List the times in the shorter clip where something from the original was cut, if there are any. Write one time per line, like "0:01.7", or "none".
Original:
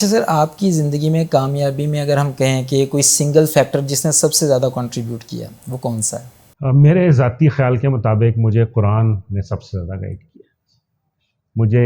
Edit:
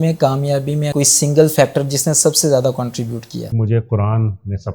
0:00.9
0:03.5